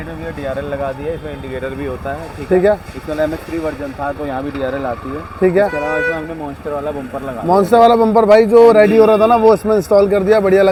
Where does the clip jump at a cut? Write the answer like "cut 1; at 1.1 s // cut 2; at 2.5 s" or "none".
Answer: none

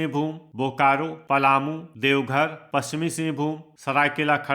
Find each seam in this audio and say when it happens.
cut 1; at 1.2 s // cut 2; at 1.9 s // cut 3; at 3.7 s

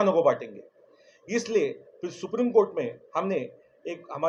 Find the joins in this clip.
none

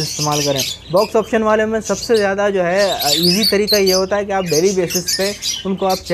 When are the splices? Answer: none

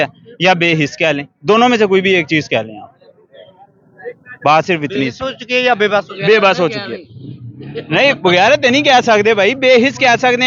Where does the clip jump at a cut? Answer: none

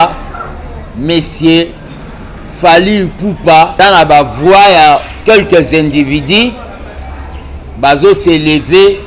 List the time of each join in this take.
cut 1; at 3.7 s

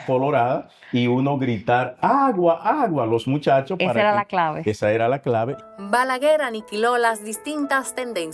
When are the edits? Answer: none

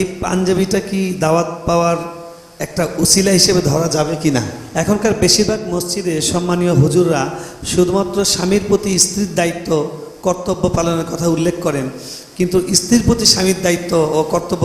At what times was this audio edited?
cut 1; at 4.6 s

